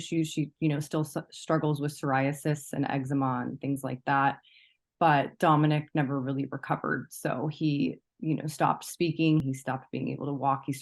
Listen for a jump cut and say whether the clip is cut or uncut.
cut